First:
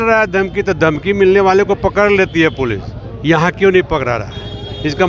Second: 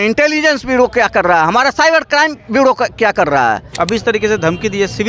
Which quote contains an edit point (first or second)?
second